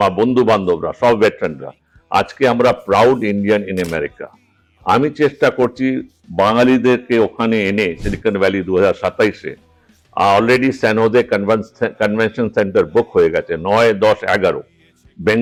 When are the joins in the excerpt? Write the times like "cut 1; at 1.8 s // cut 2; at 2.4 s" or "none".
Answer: none